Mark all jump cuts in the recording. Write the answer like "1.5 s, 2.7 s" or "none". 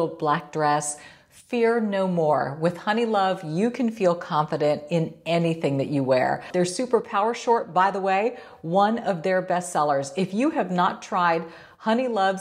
6.5 s